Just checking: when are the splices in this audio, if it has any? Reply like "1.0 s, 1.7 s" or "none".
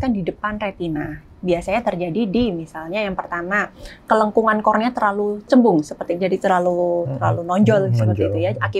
5.5 s